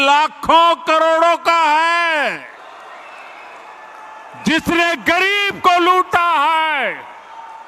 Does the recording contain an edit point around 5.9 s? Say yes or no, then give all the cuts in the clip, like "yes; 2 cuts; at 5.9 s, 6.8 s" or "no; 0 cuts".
no; 1 cut; at 2.5 s